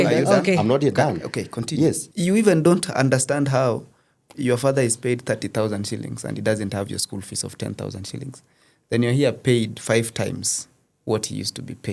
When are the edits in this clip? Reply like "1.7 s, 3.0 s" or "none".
2.1 s